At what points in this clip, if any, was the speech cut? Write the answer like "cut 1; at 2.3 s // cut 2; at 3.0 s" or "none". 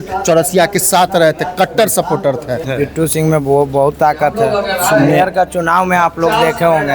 cut 1; at 2.7 s